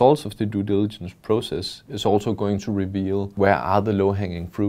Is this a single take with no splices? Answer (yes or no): no